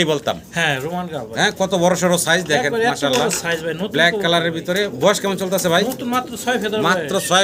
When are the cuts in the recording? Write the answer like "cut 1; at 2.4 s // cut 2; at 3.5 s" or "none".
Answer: none